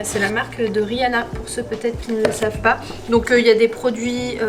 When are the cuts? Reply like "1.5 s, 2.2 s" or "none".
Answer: none